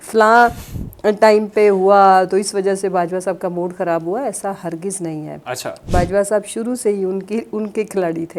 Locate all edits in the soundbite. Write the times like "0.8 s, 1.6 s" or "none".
none